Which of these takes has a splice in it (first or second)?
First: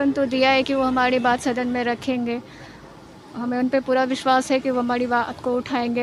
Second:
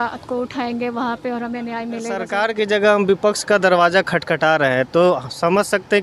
second